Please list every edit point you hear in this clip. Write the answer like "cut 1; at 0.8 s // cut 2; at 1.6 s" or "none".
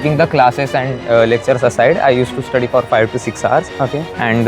none